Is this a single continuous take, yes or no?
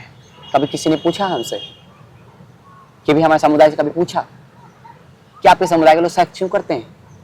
yes